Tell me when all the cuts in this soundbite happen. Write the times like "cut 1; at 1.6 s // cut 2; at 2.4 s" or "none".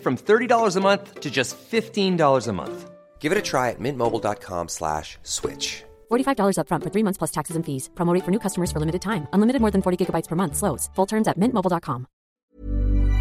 cut 1; at 12.3 s